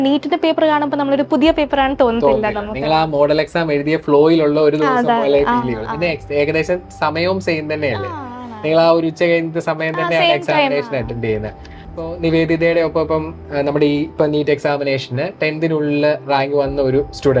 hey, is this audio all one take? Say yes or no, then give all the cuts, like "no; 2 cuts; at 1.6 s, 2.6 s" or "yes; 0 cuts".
yes; 0 cuts